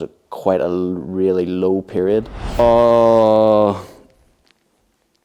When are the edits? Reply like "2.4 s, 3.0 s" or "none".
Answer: 2.6 s